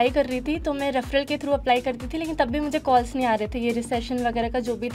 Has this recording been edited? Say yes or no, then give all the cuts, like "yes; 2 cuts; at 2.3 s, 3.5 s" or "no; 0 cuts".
no; 0 cuts